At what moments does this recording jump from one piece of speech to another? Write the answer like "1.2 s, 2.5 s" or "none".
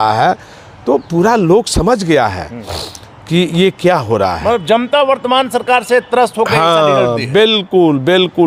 none